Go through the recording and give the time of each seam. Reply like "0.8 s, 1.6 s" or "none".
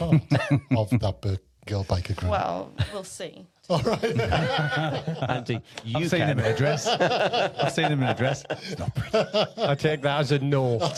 none